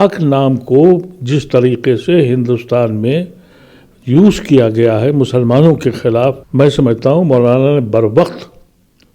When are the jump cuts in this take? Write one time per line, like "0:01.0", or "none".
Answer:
0:06.4